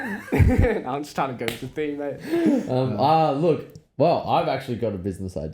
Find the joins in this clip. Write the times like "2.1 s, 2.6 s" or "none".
none